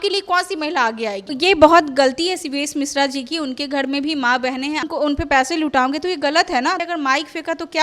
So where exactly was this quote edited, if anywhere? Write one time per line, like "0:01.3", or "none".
0:01.3
0:04.8
0:06.8